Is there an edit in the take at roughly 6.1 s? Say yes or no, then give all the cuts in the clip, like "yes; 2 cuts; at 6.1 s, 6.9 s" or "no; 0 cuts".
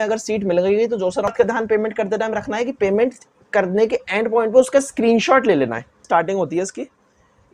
yes; 2 cuts; at 1.3 s, 6.1 s